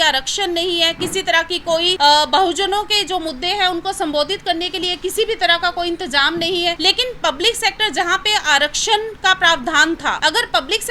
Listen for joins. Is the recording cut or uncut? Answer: cut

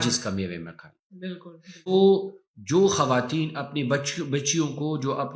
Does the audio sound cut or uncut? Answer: cut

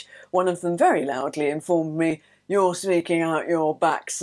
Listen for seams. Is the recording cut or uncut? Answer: uncut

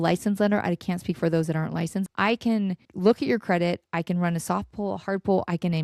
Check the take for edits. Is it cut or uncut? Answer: cut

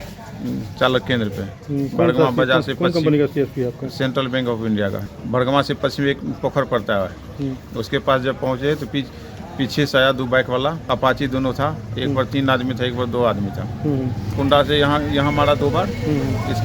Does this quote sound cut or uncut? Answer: cut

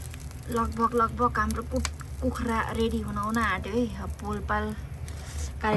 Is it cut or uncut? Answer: uncut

